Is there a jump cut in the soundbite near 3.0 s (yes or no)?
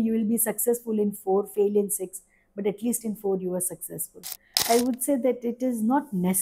no